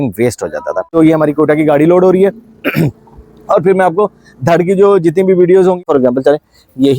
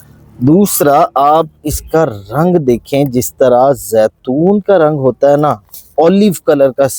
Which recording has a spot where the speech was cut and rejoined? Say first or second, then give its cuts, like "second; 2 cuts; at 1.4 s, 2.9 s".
first; 2 cuts; at 1.0 s, 5.8 s